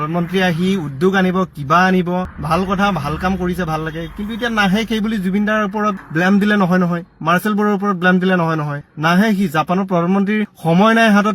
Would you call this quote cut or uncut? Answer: cut